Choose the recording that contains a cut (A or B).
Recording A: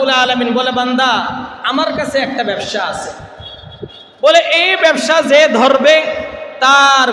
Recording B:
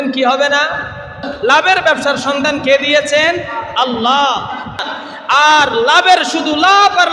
B